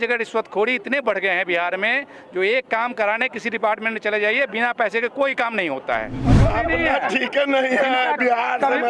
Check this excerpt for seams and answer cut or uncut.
cut